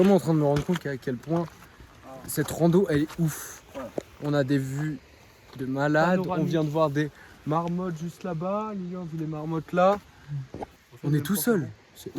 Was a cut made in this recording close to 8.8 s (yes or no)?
no